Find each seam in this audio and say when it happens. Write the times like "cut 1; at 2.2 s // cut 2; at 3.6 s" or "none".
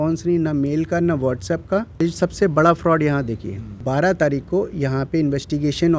cut 1; at 2.0 s // cut 2; at 3.8 s